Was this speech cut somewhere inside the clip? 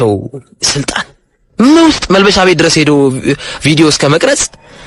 no; 0 cuts

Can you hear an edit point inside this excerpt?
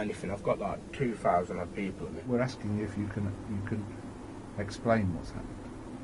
yes; 1 cut; at 2.2 s

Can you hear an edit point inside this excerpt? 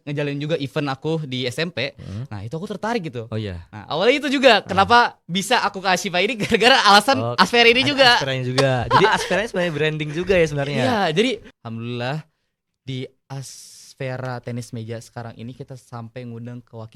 yes; 1 cut; at 11.6 s

